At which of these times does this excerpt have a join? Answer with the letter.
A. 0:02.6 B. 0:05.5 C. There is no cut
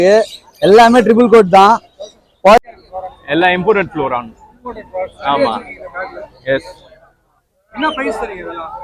A